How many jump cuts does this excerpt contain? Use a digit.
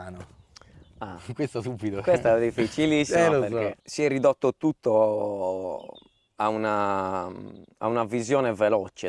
1